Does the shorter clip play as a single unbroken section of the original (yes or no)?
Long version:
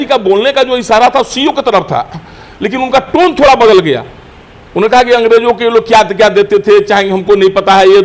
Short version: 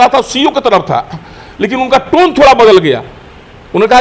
yes